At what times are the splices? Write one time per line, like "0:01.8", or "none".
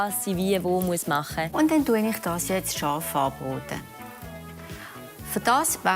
0:01.4